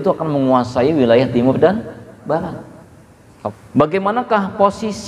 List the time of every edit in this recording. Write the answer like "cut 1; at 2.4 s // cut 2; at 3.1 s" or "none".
cut 1; at 3.5 s